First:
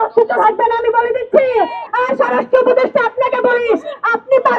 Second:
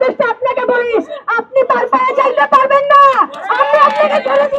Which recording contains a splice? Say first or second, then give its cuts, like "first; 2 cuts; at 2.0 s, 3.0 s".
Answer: first; 1 cut; at 1.8 s